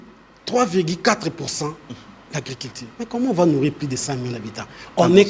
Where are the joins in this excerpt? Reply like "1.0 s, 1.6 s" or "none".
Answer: none